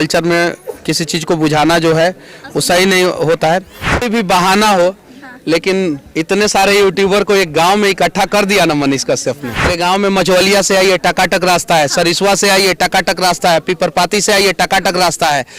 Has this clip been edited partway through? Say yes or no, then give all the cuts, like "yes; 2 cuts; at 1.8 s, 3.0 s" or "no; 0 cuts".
yes; 2 cuts; at 4.0 s, 9.7 s